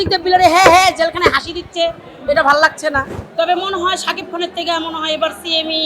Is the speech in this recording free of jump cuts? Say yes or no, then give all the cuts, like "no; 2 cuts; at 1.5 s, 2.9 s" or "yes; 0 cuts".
no; 1 cut; at 3.2 s